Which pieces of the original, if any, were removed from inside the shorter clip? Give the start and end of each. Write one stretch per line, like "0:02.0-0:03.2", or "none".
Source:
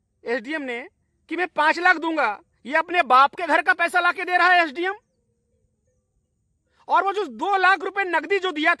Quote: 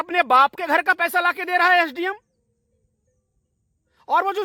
none